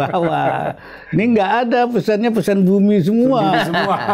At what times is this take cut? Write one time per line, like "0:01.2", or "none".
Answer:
none